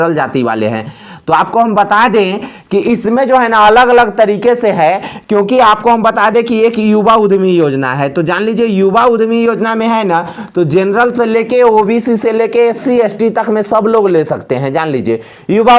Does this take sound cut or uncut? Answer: uncut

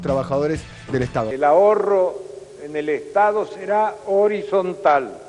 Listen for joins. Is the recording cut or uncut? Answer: cut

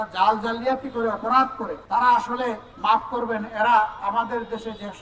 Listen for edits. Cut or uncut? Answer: cut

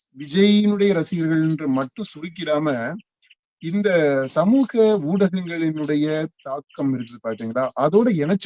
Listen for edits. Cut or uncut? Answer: uncut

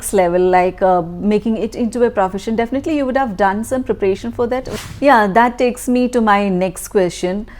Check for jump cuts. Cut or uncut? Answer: cut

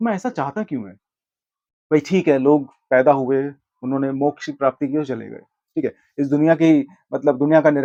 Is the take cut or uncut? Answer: uncut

